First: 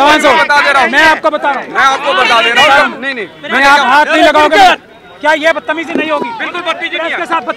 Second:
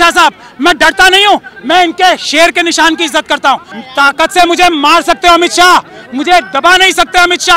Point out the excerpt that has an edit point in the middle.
second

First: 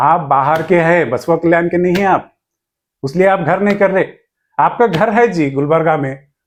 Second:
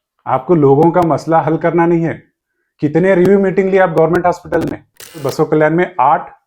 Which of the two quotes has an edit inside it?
second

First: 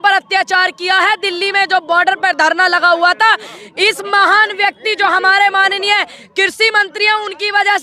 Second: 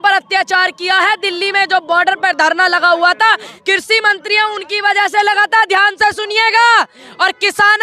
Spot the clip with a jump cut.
second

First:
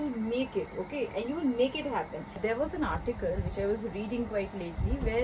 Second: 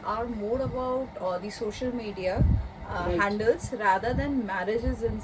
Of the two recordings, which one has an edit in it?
first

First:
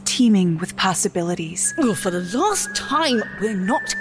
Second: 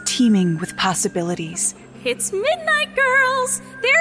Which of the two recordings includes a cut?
first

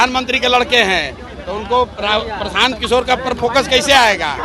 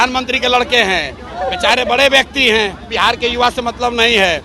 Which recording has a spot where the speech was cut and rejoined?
second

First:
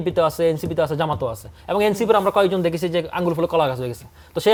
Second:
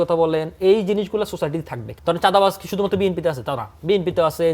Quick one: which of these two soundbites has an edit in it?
second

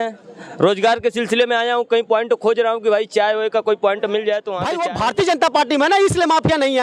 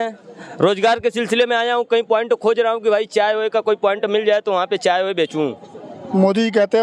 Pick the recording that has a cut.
first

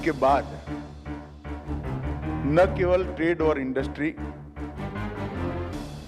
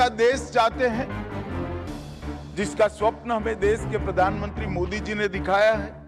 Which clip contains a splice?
first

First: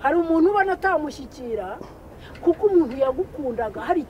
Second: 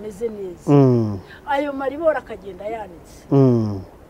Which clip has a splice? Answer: first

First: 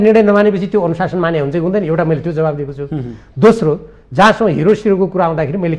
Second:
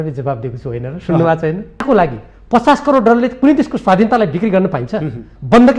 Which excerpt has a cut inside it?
second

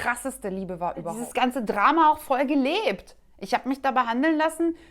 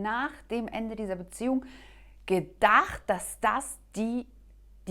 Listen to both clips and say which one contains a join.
first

